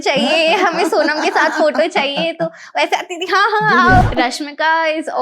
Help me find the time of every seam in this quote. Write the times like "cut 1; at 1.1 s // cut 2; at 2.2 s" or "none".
cut 1; at 4.0 s